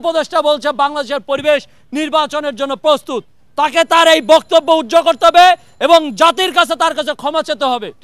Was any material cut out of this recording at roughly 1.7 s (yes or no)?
no